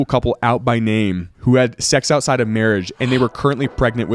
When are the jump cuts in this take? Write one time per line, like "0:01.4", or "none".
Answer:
none